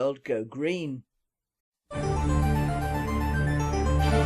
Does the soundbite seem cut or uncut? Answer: uncut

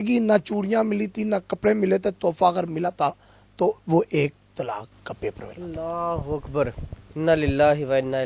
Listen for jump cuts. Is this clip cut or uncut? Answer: uncut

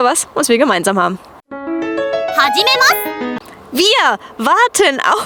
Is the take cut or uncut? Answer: uncut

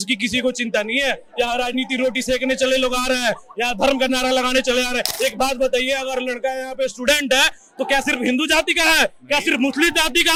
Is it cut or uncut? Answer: uncut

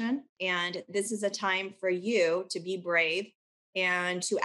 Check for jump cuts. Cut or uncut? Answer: uncut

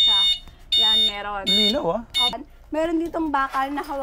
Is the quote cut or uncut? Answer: cut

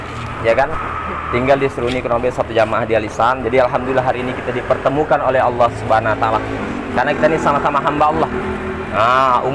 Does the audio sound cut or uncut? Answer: uncut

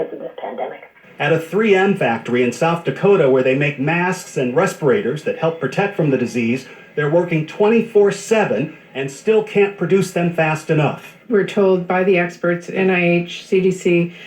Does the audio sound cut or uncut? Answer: cut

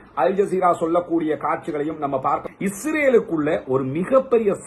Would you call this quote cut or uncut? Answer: cut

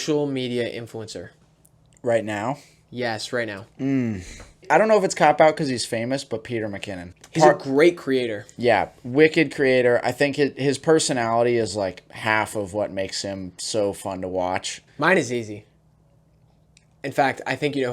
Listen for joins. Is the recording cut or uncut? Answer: cut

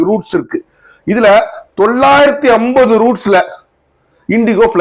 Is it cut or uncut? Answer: uncut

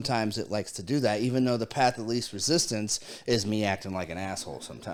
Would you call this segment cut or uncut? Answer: uncut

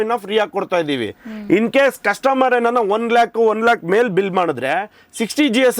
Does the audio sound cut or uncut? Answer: uncut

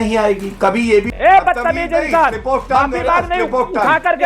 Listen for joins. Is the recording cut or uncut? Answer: cut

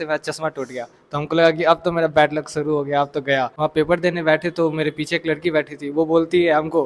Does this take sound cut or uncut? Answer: cut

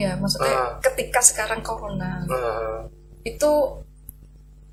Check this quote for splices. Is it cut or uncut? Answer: uncut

